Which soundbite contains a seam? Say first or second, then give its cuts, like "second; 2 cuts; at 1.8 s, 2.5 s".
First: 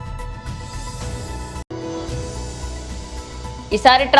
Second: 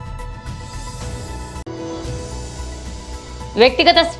first; 1 cut; at 1.6 s